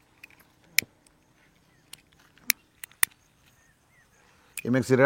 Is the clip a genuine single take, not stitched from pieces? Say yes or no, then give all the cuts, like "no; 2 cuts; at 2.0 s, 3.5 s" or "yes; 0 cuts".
yes; 0 cuts